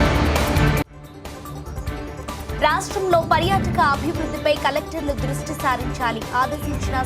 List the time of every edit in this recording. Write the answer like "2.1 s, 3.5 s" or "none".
2.0 s